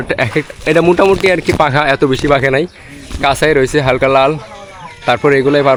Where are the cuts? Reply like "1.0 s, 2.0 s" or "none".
none